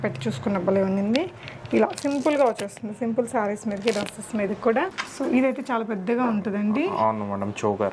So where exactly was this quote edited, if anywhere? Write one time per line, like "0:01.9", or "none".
0:05.0